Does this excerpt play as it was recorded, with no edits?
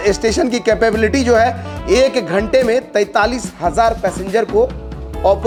yes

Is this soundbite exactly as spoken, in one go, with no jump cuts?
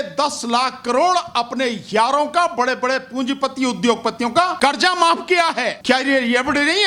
no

